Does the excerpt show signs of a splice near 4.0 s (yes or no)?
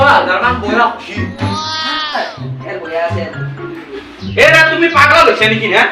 yes